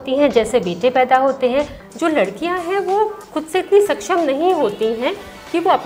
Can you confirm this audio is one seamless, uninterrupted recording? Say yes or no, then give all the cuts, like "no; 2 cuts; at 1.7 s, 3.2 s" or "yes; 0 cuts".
no; 1 cut; at 1.8 s